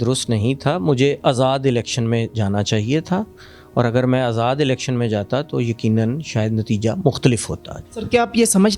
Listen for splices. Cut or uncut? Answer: uncut